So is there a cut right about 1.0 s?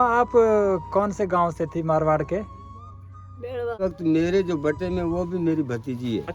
no; 1 cut; at 3.8 s

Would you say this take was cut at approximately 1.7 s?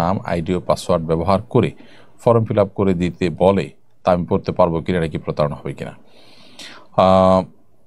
no; 0 cuts

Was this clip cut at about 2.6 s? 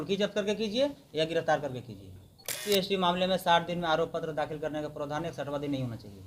yes; 1 cut; at 2.6 s

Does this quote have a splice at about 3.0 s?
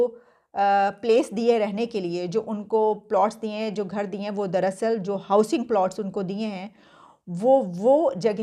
no; 0 cuts

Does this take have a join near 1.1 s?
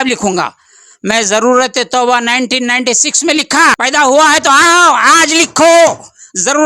no; 1 cut; at 3.8 s

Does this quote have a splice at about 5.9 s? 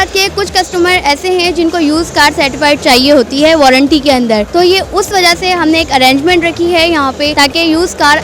no; 2 cuts; at 4.5 s, 7.3 s

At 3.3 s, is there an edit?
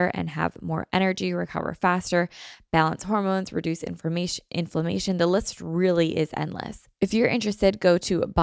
no; 1 cut; at 6.8 s

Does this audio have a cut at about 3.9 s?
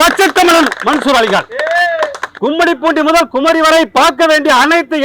no; 1 cut; at 2.2 s

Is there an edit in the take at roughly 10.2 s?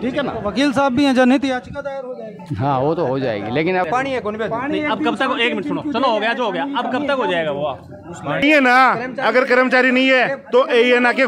no; 2 cuts; at 3.9 s, 8.4 s

